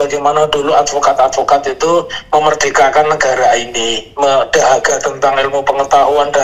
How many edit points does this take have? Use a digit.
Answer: 0